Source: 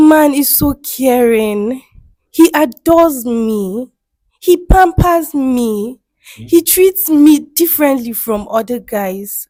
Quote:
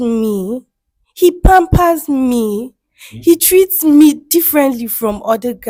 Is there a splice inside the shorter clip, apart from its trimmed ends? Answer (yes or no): no